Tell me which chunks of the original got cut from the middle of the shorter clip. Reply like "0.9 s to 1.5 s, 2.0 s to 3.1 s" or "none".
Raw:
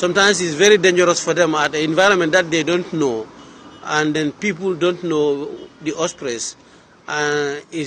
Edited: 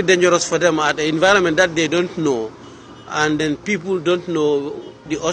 none